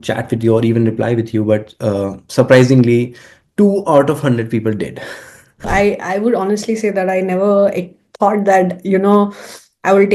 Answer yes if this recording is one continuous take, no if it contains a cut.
no